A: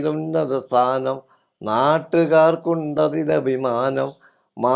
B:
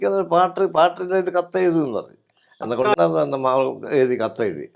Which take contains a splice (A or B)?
B